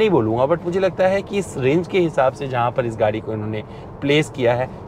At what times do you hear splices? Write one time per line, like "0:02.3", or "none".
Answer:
none